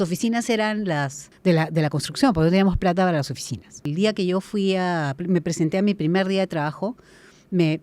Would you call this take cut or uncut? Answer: cut